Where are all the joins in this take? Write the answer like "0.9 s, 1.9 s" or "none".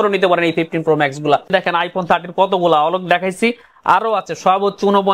1.5 s